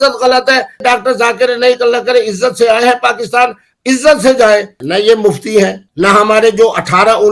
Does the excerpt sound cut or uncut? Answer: cut